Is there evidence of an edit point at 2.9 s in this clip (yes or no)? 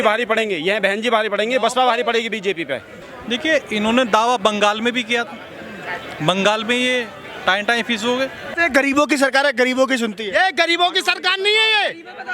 yes